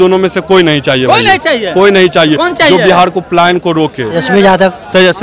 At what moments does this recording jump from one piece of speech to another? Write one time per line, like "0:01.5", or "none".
0:04.1